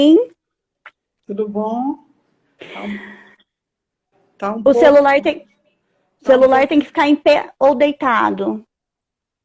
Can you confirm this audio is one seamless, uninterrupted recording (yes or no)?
yes